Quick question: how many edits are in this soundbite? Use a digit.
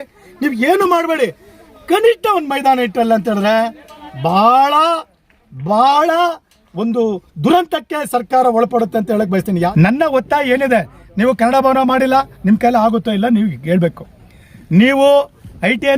1